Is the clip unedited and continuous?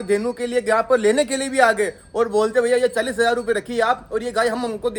yes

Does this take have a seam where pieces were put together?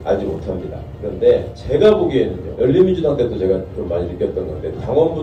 no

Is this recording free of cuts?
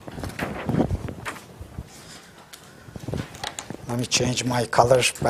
yes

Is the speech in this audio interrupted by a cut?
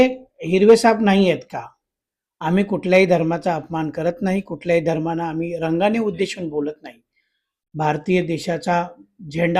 no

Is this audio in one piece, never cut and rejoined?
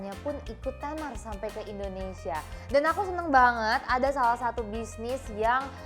yes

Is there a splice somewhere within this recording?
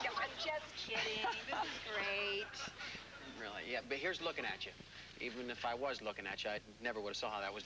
no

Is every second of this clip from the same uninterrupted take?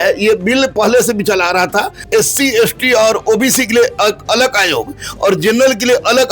no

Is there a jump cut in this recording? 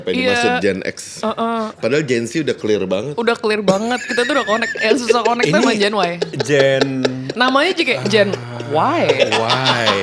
no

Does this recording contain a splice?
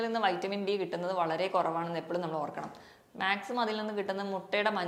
no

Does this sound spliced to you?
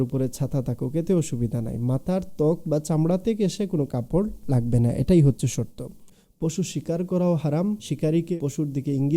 yes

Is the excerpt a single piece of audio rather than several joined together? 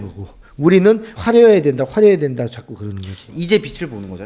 no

